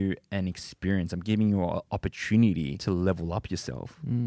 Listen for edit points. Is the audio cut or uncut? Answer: cut